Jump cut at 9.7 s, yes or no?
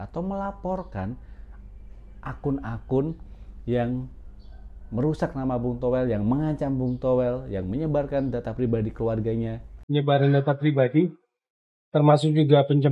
yes